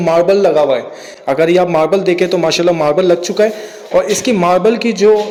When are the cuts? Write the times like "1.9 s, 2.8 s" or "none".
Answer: none